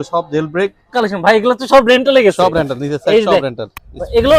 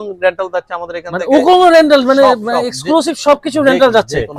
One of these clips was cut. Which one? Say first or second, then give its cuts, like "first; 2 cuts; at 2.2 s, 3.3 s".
first; 1 cut; at 0.9 s